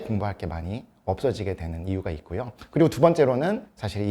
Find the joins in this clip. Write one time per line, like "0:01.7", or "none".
none